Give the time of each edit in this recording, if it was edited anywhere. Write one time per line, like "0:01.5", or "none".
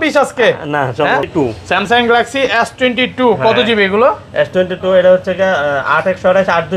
0:01.3